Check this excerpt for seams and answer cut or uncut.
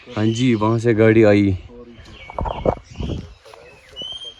uncut